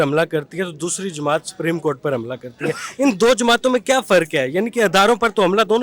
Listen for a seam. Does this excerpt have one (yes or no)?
no